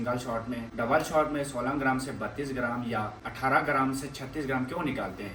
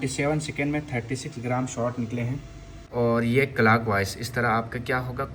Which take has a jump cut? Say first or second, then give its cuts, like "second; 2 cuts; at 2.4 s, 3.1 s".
second; 1 cut; at 2.9 s